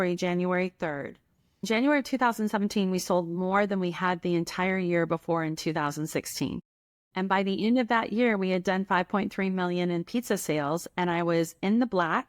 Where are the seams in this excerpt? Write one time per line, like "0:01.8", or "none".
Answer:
0:01.7